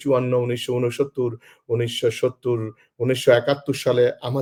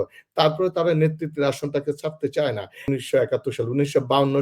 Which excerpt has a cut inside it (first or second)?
second